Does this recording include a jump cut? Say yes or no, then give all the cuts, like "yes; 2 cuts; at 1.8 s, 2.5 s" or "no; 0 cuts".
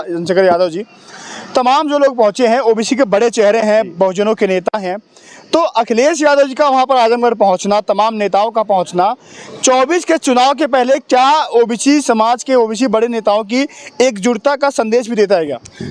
no; 0 cuts